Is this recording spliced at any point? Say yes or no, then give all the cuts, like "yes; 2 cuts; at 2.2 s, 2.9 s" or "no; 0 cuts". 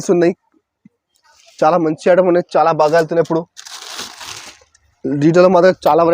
no; 0 cuts